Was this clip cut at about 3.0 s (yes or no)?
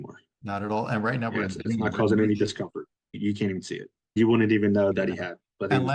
yes